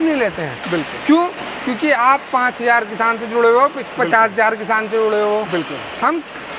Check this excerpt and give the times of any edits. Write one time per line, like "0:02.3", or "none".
none

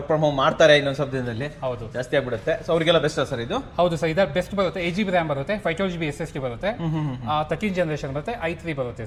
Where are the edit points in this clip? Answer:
none

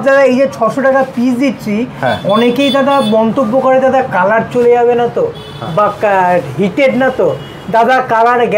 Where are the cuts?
none

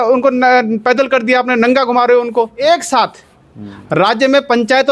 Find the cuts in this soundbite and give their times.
0:02.6

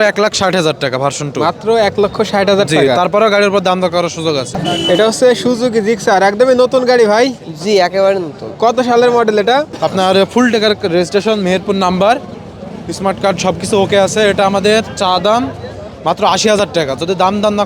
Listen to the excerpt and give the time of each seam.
0:04.5
0:09.7

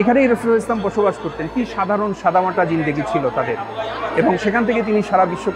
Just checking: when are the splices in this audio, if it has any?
none

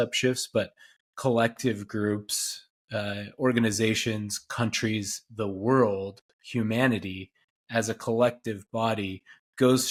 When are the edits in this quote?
none

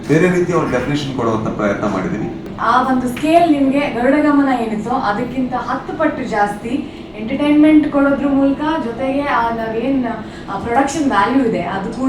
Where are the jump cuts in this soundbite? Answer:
0:02.5

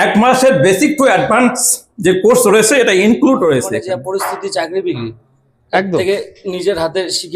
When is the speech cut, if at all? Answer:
0:03.8

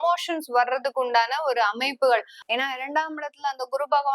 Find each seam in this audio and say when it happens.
0:02.4

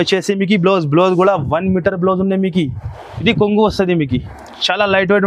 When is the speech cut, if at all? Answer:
0:03.1

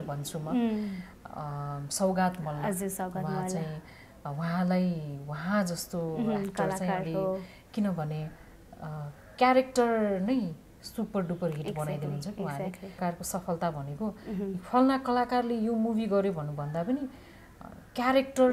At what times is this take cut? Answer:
0:13.0

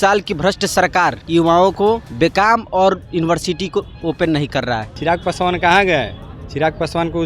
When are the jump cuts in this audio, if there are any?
0:01.2
0:02.1
0:04.9

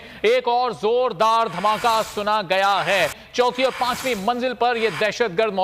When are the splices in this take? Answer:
0:03.2

